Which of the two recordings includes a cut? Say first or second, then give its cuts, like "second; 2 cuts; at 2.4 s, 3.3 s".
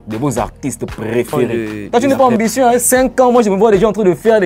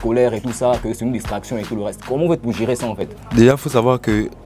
first; 1 cut; at 1.5 s